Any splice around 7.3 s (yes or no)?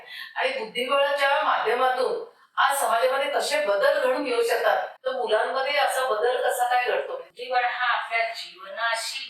yes